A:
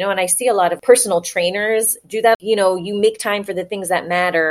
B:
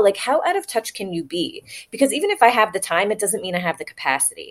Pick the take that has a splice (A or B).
A